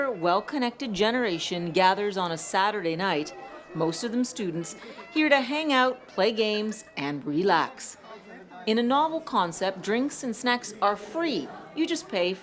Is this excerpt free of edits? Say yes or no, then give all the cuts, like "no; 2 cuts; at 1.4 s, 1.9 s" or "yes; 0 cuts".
yes; 0 cuts